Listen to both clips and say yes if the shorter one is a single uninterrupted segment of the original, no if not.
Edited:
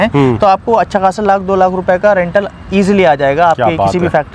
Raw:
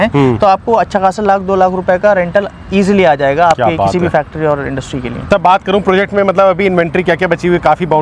yes